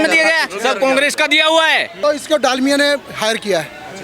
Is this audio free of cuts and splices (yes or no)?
no